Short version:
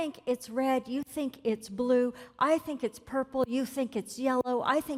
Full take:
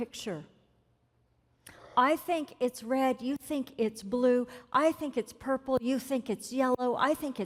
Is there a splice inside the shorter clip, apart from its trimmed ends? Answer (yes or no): no